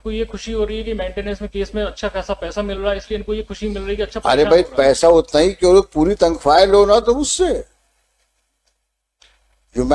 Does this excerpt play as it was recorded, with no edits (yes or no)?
yes